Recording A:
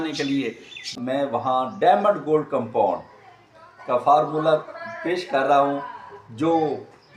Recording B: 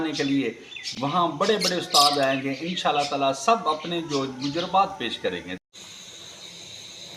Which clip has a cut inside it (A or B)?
A